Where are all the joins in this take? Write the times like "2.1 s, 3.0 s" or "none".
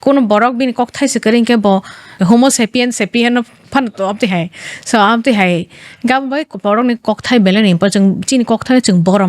2.1 s